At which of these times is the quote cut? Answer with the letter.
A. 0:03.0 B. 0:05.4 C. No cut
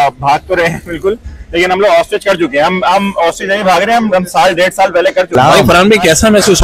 B